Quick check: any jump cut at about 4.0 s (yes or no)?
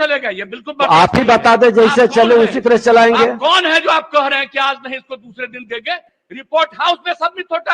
no